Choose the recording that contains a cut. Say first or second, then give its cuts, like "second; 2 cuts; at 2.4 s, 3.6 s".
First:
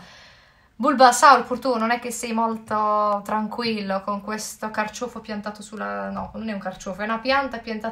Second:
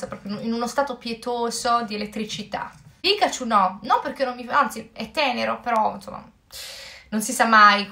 second; 1 cut; at 2.8 s